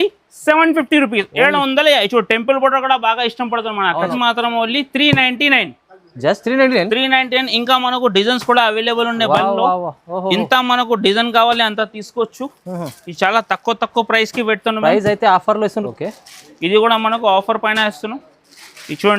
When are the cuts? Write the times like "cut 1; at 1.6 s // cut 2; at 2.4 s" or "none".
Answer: cut 1; at 4.1 s // cut 2; at 15.9 s